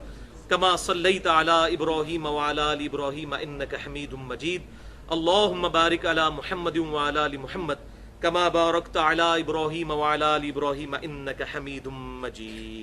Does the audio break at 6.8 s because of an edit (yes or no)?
no